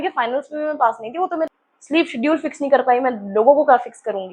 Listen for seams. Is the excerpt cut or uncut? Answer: cut